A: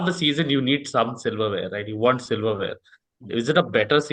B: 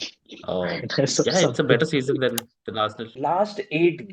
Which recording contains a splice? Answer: B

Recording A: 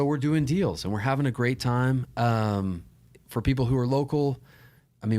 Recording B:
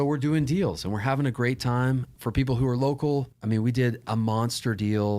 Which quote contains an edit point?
B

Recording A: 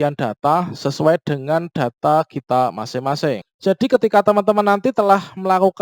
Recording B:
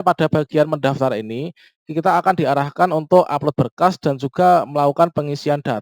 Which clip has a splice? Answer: A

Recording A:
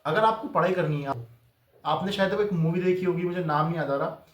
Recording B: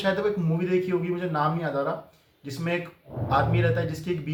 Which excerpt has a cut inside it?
A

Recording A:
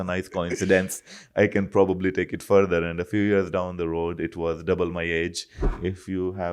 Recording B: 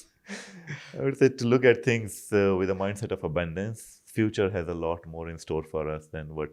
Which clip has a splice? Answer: A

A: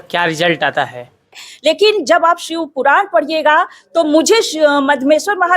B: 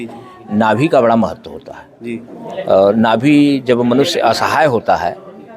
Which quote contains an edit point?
A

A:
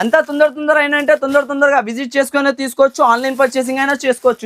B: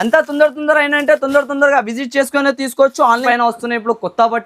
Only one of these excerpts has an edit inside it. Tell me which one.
B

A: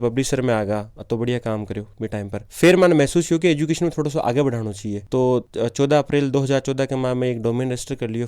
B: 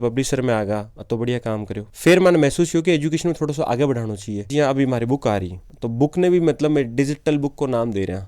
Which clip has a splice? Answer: B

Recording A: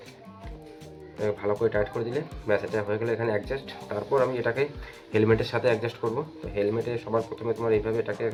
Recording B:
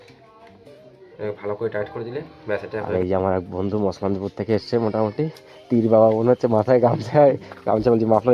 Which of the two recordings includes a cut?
B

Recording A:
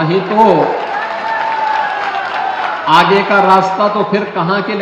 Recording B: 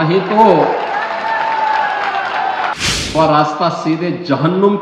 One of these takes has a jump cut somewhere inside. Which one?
B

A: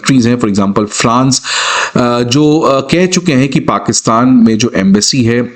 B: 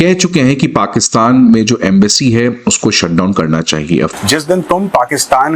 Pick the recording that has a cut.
B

